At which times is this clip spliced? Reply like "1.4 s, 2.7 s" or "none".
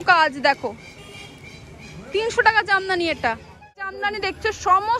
3.9 s